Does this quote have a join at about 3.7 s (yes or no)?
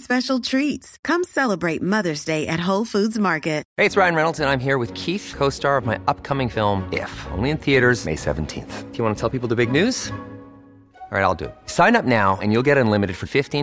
yes